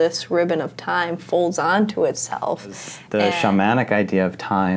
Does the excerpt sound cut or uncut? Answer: cut